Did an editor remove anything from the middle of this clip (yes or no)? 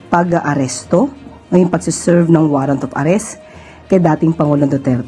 no